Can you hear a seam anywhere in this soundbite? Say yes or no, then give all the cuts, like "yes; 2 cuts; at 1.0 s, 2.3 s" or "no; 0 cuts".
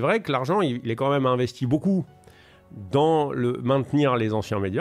no; 0 cuts